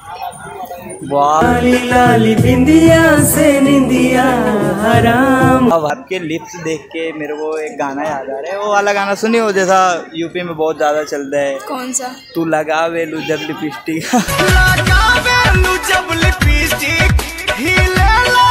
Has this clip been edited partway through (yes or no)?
yes